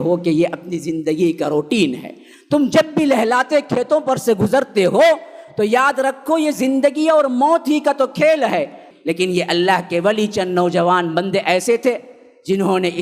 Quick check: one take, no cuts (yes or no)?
no